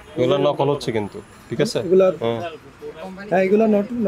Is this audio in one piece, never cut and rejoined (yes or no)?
yes